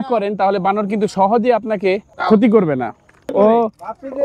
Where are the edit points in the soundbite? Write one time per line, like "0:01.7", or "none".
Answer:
0:02.1
0:03.3